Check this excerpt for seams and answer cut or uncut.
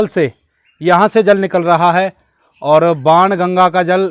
uncut